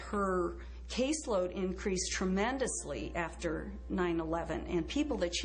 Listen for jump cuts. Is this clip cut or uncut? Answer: cut